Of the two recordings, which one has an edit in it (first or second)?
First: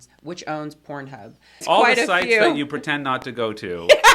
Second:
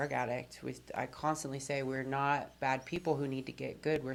first